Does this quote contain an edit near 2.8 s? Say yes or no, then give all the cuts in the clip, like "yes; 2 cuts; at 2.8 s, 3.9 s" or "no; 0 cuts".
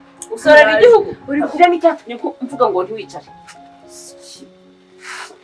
no; 1 cut; at 1.6 s